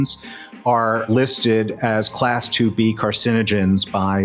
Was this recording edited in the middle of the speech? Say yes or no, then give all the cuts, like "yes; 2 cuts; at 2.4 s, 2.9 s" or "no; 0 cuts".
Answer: yes; 1 cut; at 1.1 s